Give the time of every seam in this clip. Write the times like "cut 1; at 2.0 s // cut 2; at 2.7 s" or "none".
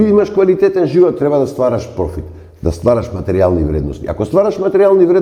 none